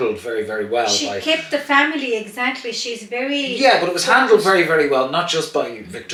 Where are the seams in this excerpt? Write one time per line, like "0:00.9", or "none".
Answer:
none